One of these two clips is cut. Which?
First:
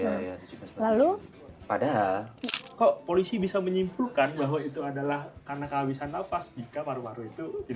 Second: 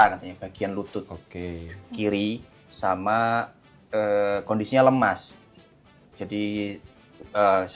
first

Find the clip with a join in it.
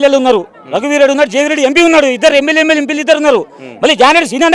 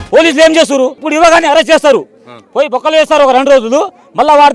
second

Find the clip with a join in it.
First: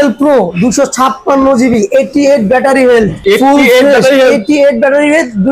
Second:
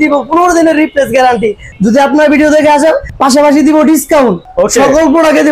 second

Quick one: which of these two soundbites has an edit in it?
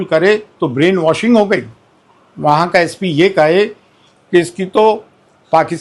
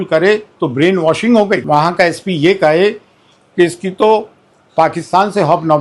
second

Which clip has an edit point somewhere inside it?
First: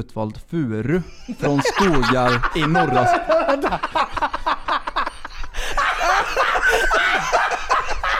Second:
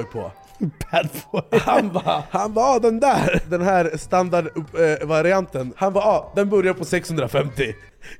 second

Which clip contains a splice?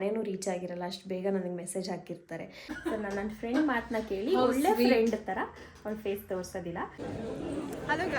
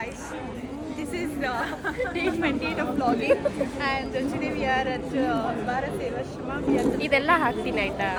first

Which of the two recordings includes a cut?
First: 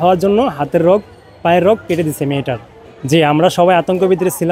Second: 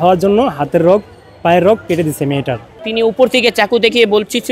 second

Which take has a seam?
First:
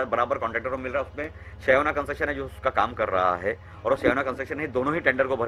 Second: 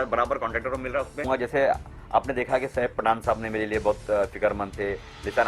second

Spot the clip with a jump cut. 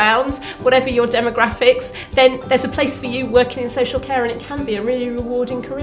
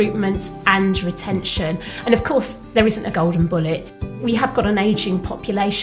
second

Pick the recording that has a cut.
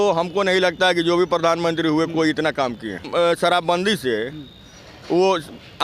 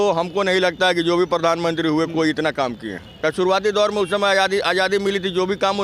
first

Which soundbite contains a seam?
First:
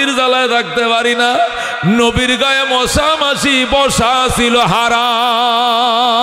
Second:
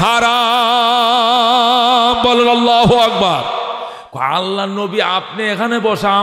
second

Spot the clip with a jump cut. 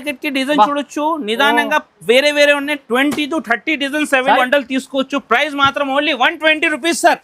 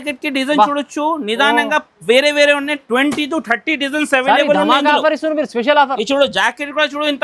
first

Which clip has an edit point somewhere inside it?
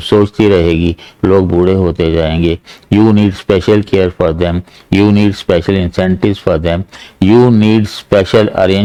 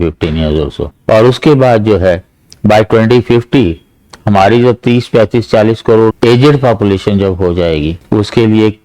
second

